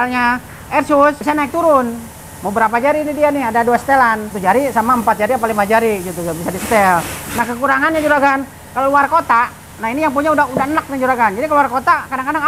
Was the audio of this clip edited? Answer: yes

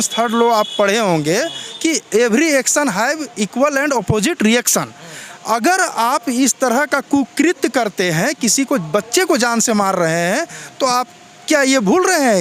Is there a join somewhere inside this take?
no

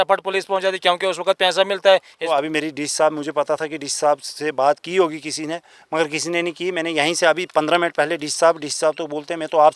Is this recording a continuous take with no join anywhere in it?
no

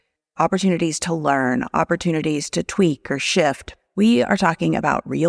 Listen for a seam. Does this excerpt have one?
yes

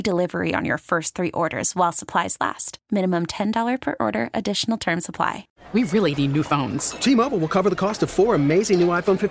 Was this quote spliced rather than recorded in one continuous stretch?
yes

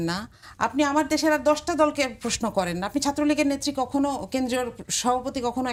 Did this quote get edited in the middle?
no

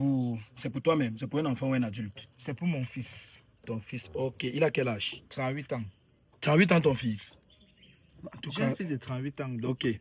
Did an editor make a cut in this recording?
no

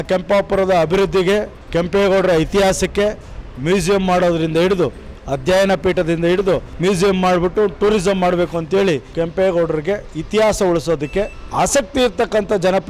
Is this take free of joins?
no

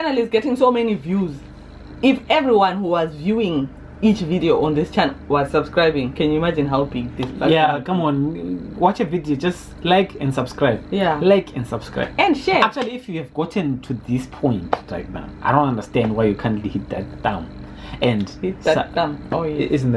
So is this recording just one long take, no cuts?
yes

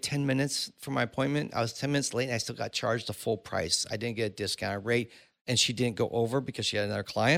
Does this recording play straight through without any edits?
yes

